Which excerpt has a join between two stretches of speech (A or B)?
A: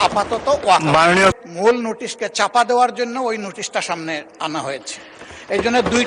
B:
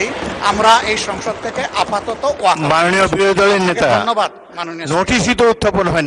A